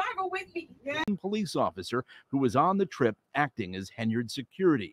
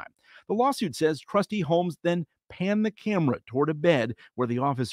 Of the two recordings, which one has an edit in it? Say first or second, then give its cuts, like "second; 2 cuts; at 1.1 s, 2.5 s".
first; 1 cut; at 1.0 s